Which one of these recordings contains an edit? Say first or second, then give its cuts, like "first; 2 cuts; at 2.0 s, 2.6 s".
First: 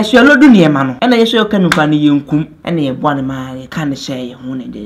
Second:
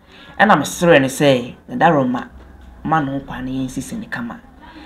first; 3 cuts; at 0.9 s, 2.6 s, 3.6 s